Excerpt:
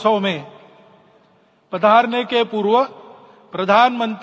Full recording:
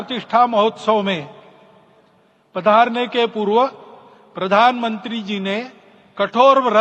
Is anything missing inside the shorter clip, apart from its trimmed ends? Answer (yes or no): no